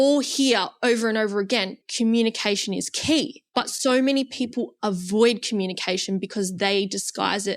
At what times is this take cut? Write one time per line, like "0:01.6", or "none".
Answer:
0:01.8
0:03.4